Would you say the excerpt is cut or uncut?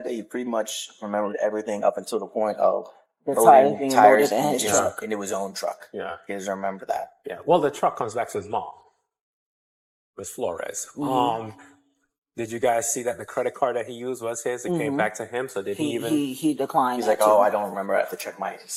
uncut